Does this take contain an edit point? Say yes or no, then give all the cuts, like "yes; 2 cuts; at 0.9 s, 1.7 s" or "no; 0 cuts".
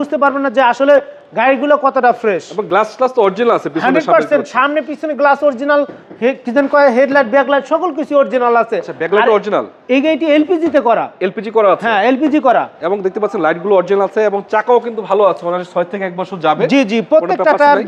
no; 0 cuts